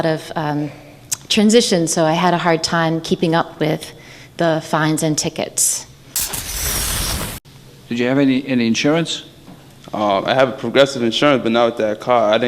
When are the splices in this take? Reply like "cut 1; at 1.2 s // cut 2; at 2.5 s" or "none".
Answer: cut 1; at 6.0 s // cut 2; at 7.5 s

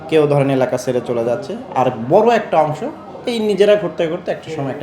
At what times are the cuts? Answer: none

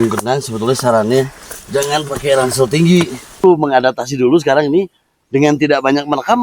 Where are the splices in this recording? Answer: cut 1; at 3.4 s

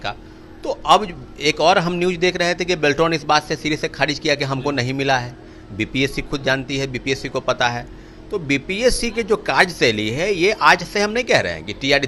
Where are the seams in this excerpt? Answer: none

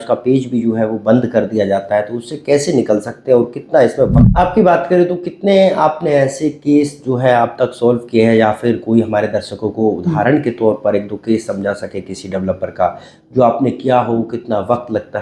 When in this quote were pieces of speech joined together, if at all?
cut 1; at 4.2 s

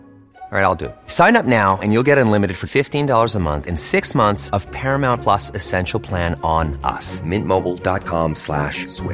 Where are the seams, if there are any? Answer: none

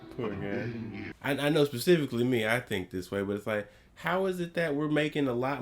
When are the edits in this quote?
cut 1; at 1.1 s

